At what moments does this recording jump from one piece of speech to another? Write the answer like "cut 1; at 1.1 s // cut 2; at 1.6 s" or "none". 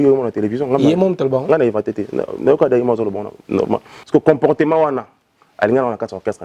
cut 1; at 3.9 s